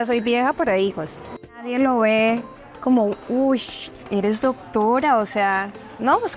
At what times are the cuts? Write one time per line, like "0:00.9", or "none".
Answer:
0:01.6